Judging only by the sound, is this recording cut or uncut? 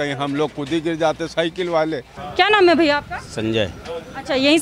cut